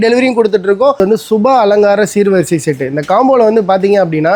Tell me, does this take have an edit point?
yes; 1 cut; at 1.0 s

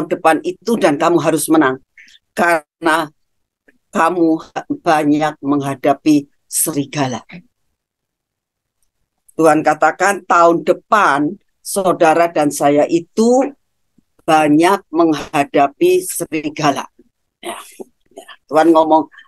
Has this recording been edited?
yes; 1 cut; at 18.1 s

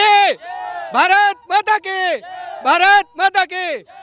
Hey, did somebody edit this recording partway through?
no; 0 cuts

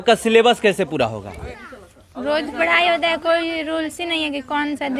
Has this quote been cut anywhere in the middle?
no; 0 cuts

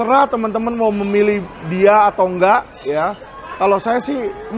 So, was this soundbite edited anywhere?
no; 0 cuts

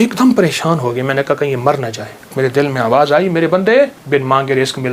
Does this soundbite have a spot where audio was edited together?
yes; 2 cuts; at 2.3 s, 4.0 s

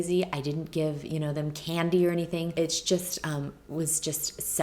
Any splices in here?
yes; 1 cut; at 2.5 s

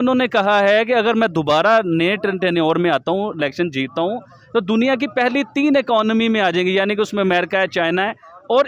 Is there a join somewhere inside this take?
no; 0 cuts

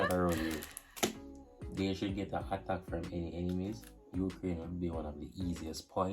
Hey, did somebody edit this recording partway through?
yes; 1 cut; at 1.5 s

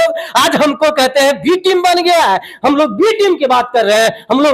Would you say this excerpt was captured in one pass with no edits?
yes; 0 cuts

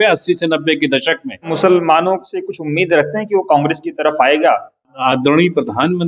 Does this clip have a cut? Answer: yes; 2 cuts; at 1.5 s, 4.9 s

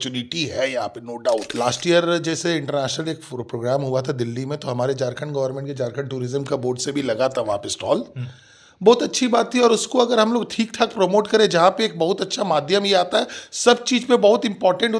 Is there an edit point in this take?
yes; 1 cut; at 1.5 s

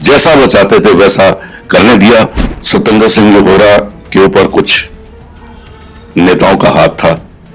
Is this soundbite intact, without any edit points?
no; 1 cut; at 2.4 s

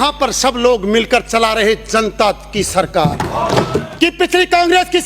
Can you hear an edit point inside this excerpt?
yes; 1 cut; at 3.9 s

